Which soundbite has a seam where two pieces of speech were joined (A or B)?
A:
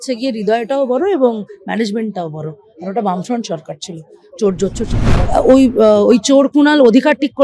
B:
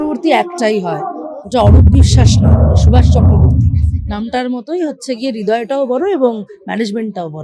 A